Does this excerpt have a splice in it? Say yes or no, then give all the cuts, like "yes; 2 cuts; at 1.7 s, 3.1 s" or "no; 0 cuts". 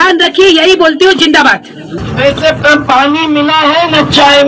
yes; 1 cut; at 1.9 s